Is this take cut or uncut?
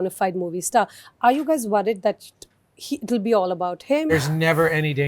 cut